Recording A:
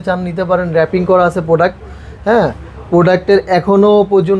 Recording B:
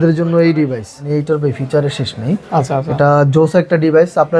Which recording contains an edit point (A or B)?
B